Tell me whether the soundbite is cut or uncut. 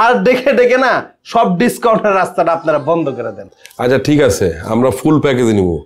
uncut